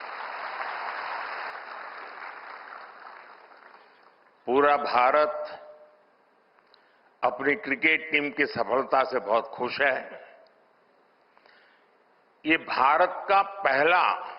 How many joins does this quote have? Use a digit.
1